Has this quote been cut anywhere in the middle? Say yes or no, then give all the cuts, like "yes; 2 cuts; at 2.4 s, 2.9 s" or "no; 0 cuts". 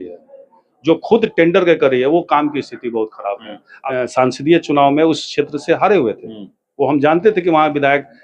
yes; 1 cut; at 3.7 s